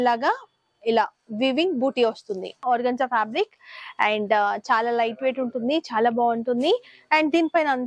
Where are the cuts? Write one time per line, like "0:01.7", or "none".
0:02.6

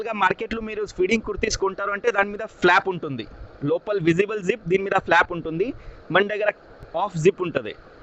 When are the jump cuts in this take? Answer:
0:06.7

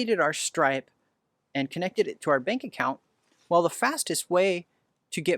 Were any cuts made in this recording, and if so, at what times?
none

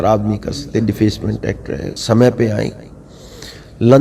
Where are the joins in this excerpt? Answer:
0:01.9

